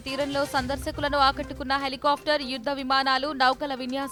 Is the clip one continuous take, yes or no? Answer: yes